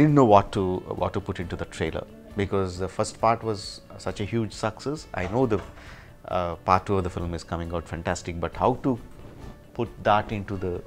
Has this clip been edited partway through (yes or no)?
no